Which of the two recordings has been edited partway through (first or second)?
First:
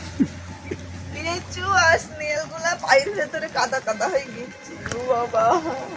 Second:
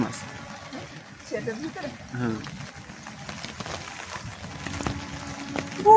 second